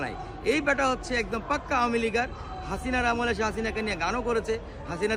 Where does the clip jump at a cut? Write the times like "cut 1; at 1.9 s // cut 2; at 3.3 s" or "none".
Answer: none